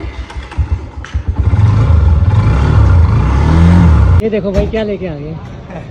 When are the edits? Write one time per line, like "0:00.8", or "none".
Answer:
0:04.3